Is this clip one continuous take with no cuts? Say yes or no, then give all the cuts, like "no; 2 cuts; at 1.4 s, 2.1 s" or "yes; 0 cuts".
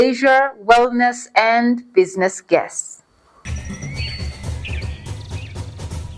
no; 1 cut; at 3.4 s